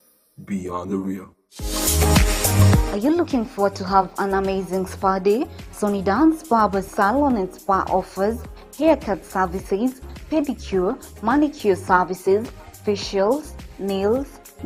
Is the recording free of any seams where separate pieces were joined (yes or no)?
no